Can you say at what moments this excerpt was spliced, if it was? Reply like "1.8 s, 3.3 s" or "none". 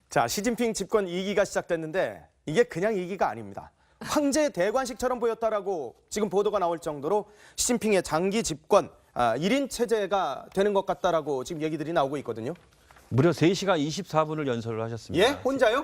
8.2 s